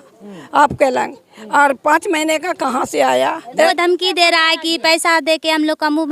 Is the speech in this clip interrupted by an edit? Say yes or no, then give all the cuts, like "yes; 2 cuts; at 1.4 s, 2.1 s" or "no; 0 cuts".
yes; 1 cut; at 3.7 s